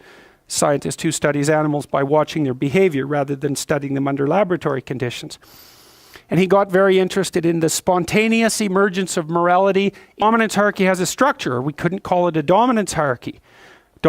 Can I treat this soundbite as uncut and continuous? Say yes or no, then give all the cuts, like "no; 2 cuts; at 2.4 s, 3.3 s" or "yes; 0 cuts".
yes; 0 cuts